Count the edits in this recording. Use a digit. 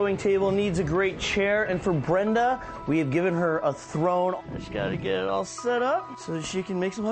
2